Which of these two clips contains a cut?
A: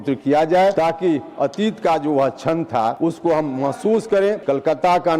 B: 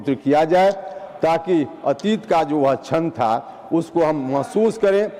A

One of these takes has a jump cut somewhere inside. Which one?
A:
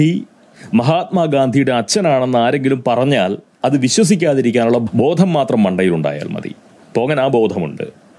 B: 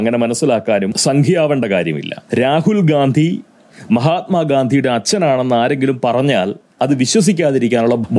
B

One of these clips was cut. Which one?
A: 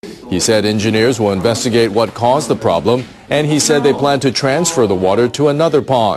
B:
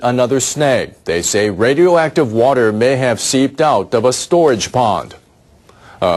A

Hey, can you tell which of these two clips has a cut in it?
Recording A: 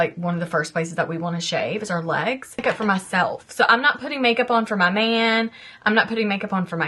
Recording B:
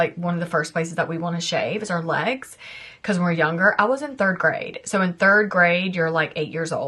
A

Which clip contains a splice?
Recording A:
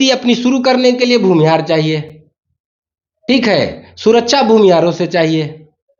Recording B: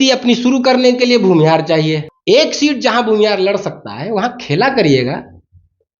B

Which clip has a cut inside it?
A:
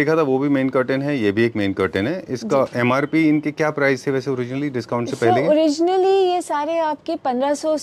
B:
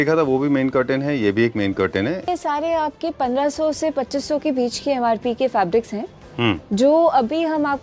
B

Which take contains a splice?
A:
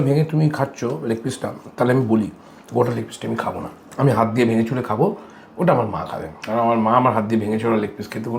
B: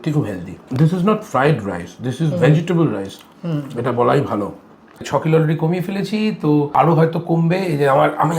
B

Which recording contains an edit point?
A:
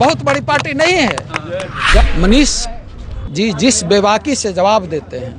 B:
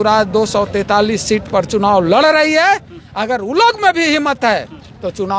A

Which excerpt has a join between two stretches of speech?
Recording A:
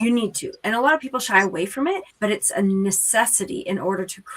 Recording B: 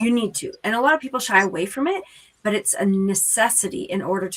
A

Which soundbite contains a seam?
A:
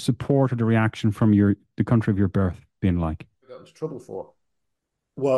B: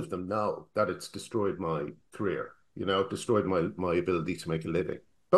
A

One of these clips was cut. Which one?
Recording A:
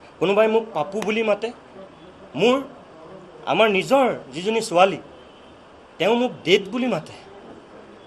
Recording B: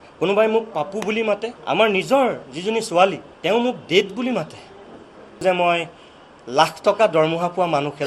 B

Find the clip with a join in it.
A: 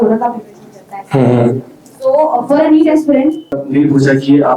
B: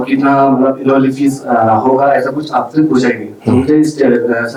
A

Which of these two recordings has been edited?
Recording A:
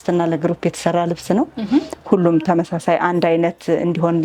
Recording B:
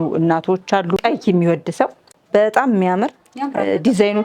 B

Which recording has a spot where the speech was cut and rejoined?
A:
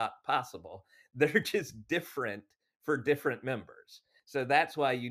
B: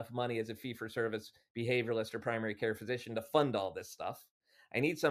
A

